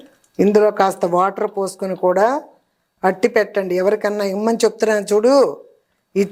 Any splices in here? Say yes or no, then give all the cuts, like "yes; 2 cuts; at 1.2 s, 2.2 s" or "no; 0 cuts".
no; 0 cuts